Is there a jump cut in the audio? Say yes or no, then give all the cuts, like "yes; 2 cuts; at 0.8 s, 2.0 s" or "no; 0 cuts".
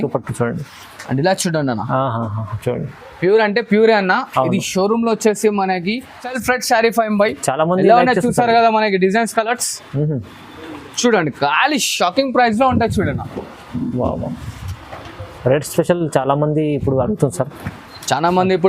yes; 1 cut; at 6.3 s